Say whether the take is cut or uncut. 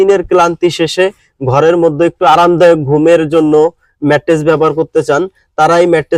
uncut